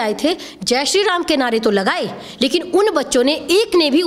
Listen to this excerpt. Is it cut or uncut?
uncut